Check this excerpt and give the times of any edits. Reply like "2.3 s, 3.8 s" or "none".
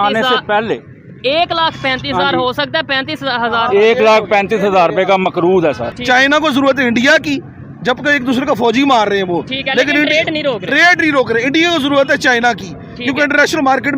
5.9 s